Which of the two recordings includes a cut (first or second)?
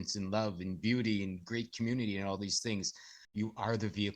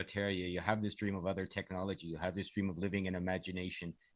first